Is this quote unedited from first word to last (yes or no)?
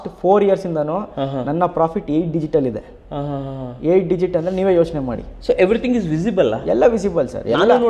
yes